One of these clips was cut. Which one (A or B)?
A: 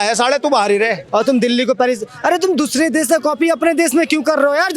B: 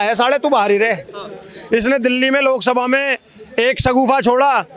A